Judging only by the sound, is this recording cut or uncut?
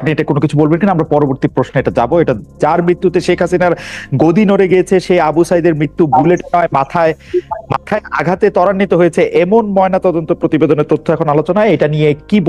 cut